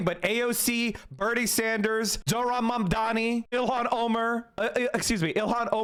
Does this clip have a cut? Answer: no; 0 cuts

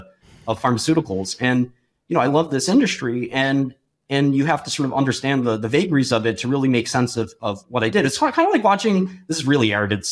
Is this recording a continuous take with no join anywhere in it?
yes; 0 cuts

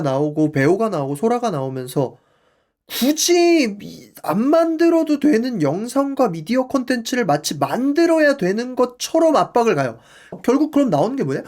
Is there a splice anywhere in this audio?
yes; 1 cut; at 10.4 s

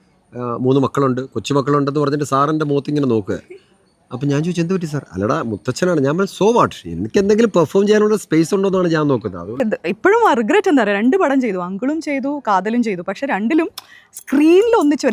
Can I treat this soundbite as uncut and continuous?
no; 1 cut; at 9.6 s

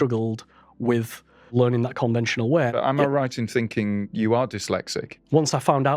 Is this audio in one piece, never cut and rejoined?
no; 4 cuts; at 1.5 s, 2.7 s, 4.1 s, 5.0 s

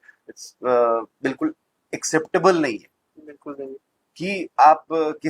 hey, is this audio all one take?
yes; 0 cuts

